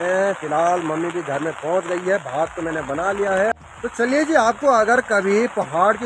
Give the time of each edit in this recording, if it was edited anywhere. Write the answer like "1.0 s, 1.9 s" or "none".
3.5 s